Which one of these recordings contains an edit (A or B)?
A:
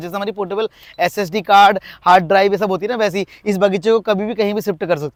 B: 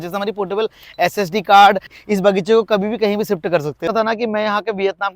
B